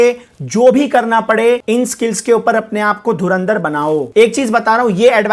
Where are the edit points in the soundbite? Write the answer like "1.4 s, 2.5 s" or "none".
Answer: 1.6 s